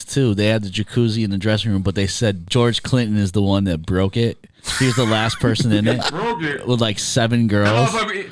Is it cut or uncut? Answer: cut